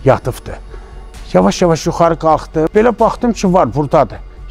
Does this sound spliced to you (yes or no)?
yes